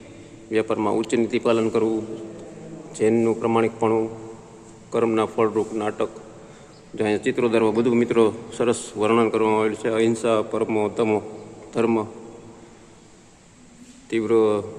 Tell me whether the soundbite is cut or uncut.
uncut